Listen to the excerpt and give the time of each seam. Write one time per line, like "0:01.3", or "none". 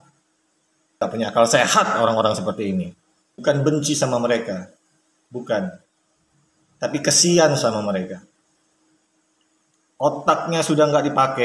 0:01.0

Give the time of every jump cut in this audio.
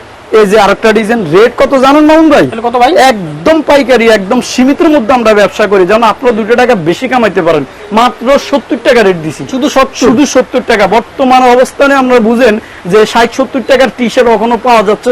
none

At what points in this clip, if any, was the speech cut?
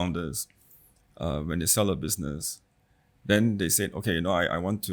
none

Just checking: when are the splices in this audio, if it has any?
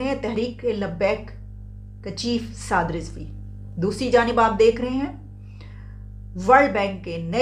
none

